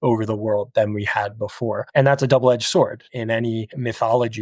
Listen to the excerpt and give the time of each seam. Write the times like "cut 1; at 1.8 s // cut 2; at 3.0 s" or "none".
cut 1; at 1.8 s // cut 2; at 3.3 s